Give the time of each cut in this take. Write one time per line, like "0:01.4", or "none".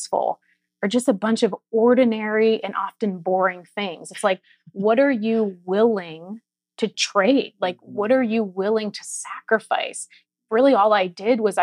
0:07.0
0:10.2